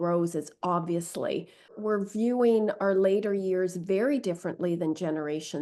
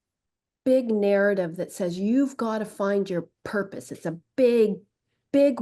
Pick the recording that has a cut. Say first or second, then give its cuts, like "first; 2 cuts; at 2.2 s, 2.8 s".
first; 1 cut; at 1.8 s